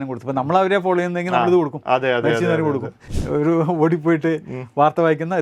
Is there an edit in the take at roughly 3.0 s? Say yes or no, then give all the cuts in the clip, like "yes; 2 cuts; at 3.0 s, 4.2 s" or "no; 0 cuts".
yes; 1 cut; at 3.0 s